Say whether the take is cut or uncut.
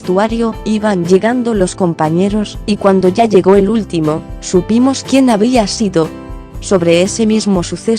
cut